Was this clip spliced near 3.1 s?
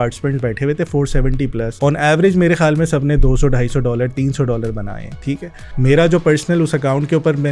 no; 2 cuts; at 1.7 s, 5.6 s

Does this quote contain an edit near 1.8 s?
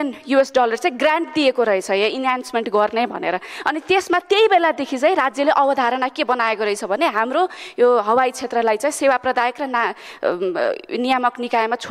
no; 0 cuts

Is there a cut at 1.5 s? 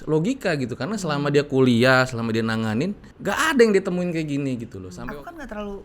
no; 2 cuts; at 3.1 s, 4.8 s

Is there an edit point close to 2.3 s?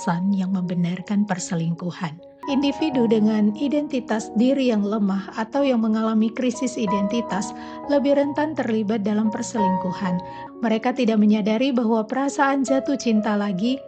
yes; 2 cuts; at 2.3 s, 10.4 s

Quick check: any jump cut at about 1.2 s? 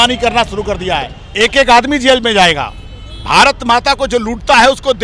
yes; 1 cut; at 1.2 s

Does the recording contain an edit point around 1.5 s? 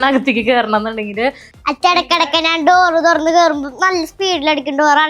yes; 1 cut; at 1.5 s

